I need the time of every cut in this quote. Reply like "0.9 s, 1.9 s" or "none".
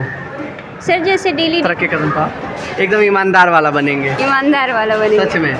1.6 s